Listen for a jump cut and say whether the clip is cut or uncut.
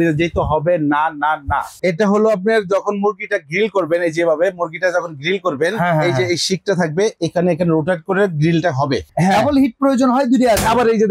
cut